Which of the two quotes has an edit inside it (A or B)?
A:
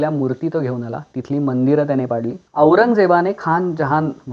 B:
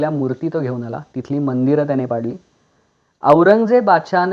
A